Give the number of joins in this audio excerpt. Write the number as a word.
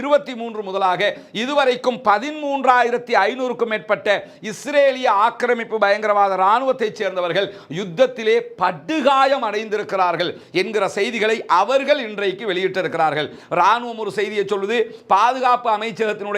zero